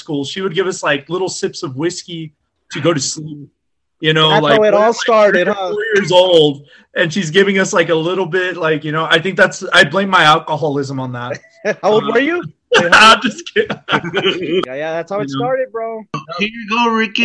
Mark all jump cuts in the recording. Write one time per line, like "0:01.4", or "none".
0:14.6
0:16.2